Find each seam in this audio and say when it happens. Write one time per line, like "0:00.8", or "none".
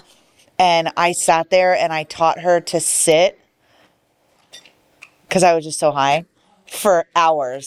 none

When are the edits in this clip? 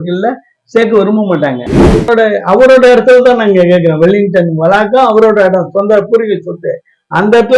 0:02.0

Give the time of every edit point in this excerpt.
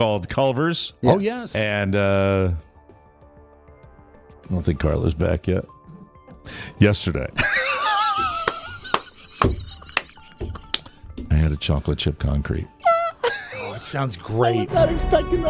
none

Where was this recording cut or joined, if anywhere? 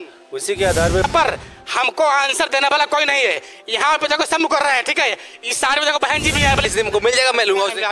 0:01.0
0:06.6

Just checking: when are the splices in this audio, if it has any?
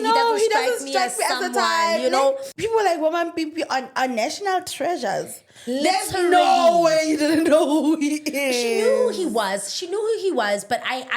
0:02.5

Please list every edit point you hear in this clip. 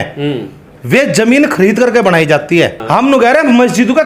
0:02.8

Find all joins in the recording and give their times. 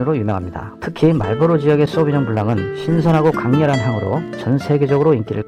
none

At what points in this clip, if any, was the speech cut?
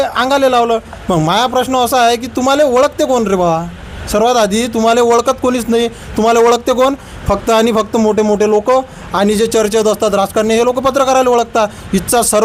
none

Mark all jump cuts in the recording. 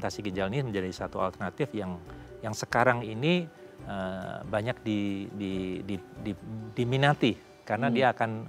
none

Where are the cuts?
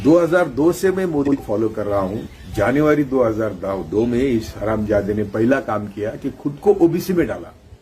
0:01.4

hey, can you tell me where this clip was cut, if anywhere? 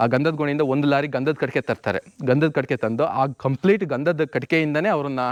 none

